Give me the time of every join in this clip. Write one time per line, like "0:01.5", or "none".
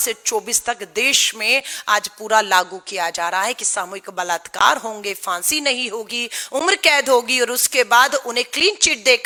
none